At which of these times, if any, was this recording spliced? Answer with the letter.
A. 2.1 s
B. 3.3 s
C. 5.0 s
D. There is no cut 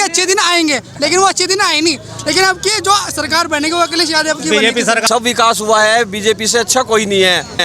C